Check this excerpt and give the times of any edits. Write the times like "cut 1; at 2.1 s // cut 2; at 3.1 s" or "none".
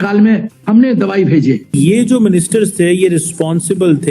cut 1; at 1.8 s